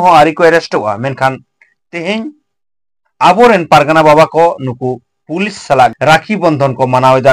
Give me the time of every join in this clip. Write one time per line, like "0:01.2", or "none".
0:06.0